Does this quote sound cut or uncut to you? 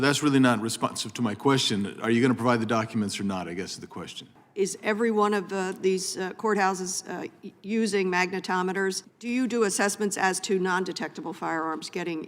cut